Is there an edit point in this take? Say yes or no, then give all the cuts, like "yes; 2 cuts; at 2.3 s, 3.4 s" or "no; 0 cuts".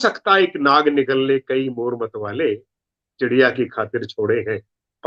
no; 0 cuts